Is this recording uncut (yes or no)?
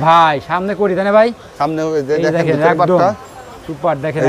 yes